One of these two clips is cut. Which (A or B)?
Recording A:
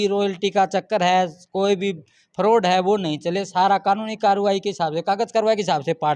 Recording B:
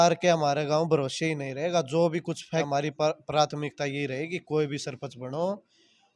B